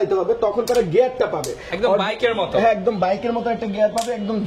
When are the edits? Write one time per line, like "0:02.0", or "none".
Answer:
none